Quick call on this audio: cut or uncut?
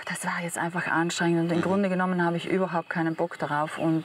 uncut